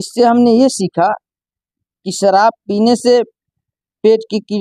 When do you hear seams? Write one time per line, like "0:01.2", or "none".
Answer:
none